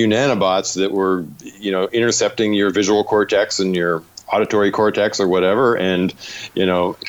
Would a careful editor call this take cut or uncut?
uncut